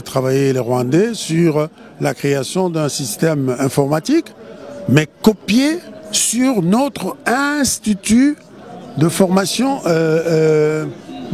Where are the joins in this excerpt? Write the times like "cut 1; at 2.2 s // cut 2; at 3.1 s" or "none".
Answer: none